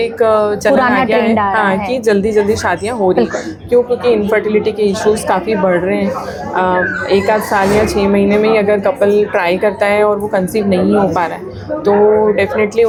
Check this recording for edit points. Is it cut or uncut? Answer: uncut